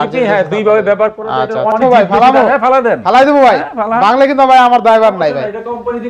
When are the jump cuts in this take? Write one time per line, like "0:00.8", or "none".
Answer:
0:01.8